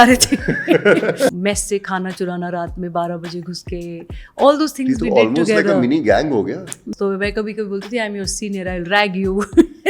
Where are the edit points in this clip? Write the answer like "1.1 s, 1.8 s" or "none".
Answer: 1.3 s, 6.8 s